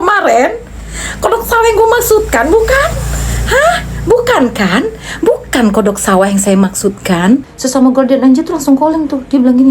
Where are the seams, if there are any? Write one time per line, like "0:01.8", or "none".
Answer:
0:07.4

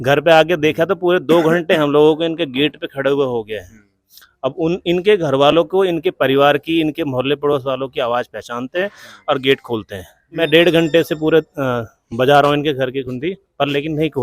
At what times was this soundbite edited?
0:10.4

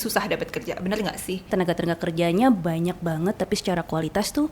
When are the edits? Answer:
0:01.5

